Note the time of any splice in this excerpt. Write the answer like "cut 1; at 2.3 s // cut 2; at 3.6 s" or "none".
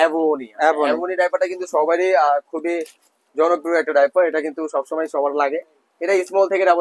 none

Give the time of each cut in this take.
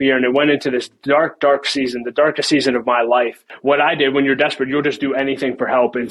cut 1; at 3.5 s

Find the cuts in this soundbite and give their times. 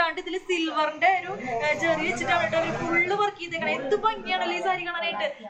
none

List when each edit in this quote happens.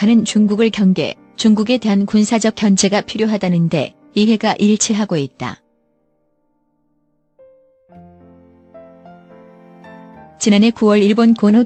none

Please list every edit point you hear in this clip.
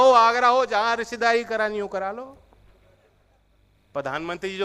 cut 1; at 3.4 s

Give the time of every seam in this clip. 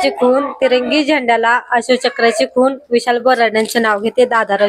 none

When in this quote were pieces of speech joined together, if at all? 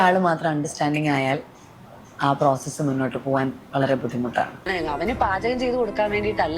cut 1; at 4.7 s

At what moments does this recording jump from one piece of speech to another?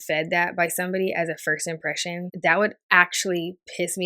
cut 1; at 2.3 s

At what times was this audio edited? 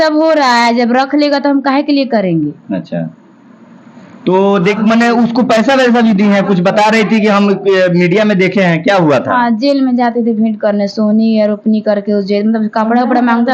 cut 1; at 4.6 s

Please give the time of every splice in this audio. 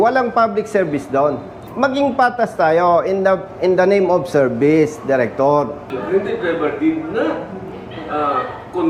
cut 1; at 1.5 s // cut 2; at 5.9 s

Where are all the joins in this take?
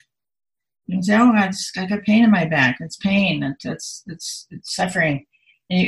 none

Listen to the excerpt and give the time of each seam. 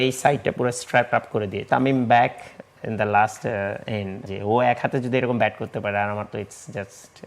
cut 1; at 1.7 s // cut 2; at 4.2 s

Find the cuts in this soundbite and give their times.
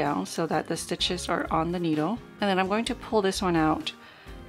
cut 1; at 2.3 s

